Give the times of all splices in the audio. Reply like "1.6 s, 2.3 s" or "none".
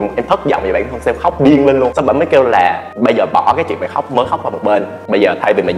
none